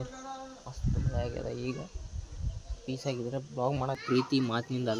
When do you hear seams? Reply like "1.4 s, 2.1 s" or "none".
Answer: 4.0 s